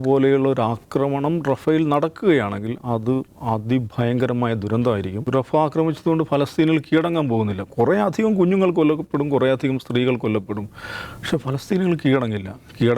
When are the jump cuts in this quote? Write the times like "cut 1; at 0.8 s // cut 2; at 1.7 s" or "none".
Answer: cut 1; at 5.2 s